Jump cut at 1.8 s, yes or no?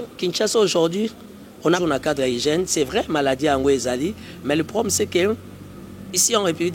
yes